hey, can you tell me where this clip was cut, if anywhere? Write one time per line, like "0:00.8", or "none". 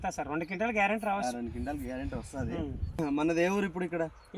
0:03.0

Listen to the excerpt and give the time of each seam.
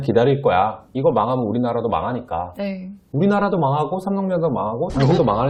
none

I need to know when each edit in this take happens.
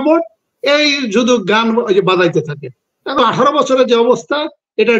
0:03.2

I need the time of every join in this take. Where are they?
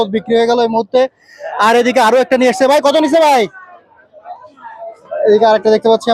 none

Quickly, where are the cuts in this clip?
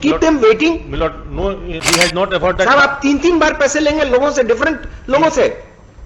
0:01.7

